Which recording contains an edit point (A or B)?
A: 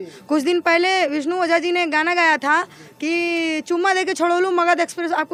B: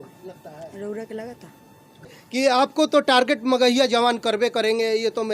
B